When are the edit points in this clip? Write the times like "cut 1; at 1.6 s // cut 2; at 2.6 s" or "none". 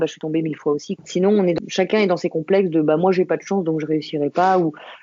cut 1; at 1.0 s // cut 2; at 1.6 s